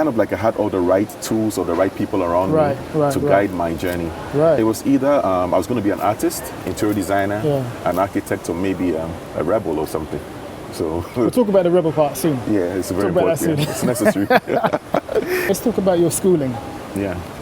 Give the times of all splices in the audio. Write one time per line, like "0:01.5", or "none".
none